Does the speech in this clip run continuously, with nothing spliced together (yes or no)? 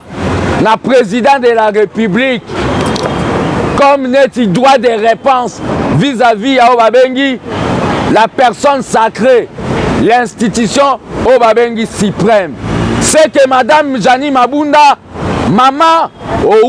yes